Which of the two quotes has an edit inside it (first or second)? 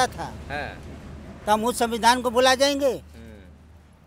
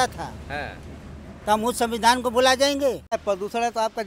second